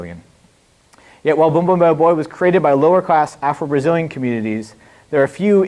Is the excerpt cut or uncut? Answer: cut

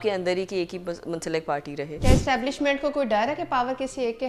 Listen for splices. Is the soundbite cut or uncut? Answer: cut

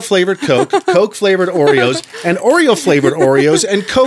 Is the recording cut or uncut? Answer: uncut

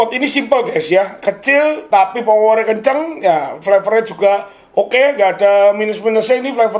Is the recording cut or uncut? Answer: uncut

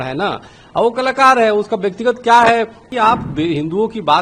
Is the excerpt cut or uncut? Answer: cut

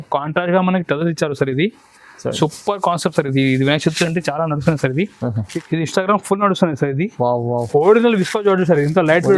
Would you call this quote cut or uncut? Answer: cut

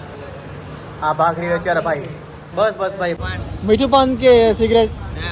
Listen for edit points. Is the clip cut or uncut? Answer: cut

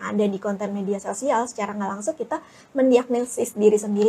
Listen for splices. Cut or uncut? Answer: uncut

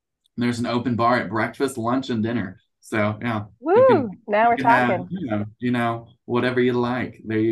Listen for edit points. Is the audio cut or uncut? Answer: uncut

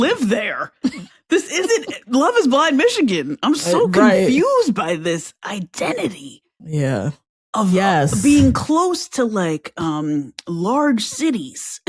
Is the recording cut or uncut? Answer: uncut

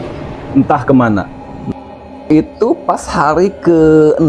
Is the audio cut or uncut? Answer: cut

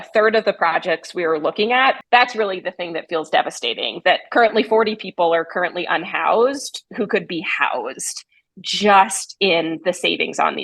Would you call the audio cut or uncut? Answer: cut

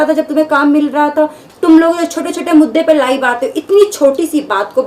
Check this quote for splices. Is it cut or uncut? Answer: cut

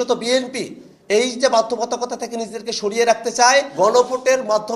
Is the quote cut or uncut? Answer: cut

